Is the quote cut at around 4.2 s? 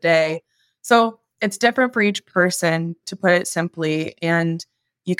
no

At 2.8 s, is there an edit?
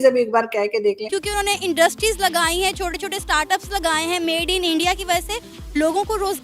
no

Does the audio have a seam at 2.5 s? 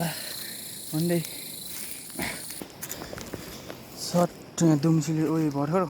yes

